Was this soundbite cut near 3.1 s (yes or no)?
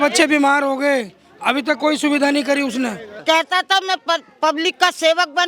yes